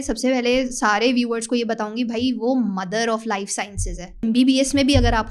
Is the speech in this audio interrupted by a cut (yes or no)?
yes